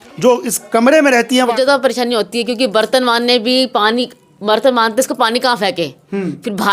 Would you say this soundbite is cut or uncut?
cut